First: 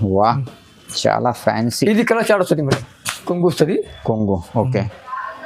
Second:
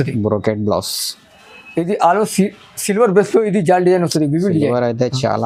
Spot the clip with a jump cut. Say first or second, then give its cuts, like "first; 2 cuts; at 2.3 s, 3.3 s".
first; 1 cut; at 3.2 s